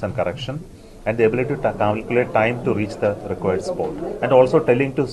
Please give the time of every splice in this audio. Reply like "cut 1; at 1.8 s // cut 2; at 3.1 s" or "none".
none